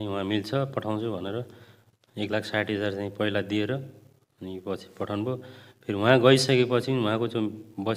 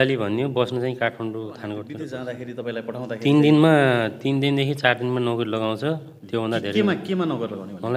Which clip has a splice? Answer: second; 1 cut; at 2.0 s

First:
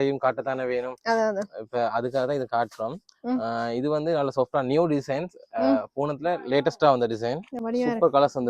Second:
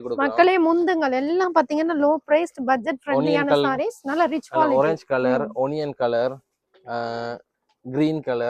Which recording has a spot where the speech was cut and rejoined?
first; 1 cut; at 7.6 s

